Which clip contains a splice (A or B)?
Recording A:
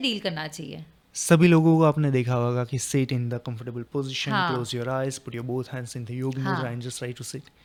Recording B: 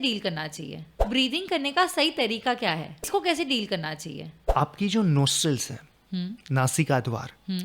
B